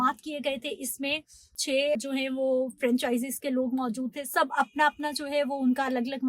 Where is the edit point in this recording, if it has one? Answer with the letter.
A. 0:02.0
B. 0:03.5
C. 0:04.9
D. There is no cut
A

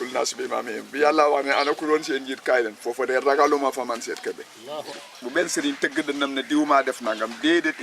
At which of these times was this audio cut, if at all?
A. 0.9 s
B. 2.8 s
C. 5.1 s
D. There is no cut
C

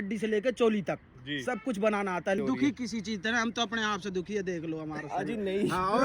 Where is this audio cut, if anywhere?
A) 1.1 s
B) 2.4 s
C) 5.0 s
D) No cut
B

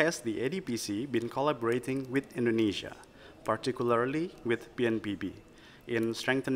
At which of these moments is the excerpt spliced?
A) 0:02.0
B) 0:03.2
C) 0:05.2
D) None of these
D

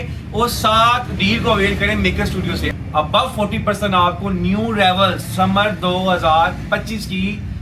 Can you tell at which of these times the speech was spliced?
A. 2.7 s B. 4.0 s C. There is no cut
A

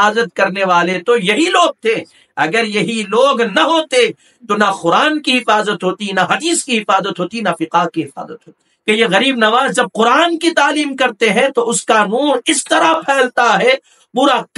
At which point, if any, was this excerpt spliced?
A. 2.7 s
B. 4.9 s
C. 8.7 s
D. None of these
C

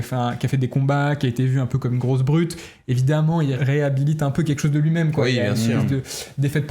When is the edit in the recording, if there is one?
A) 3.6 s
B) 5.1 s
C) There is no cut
A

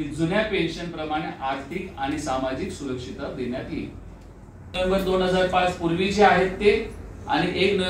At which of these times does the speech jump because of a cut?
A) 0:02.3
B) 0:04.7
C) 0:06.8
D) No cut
B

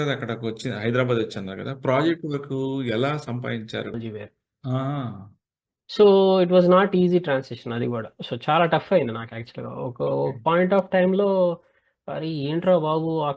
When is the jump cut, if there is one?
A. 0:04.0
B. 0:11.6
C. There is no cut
A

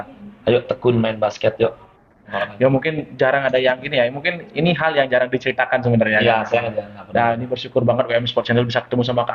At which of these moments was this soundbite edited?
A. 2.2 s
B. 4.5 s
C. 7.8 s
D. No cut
A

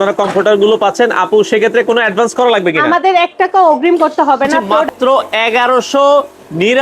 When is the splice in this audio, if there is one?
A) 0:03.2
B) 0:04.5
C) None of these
B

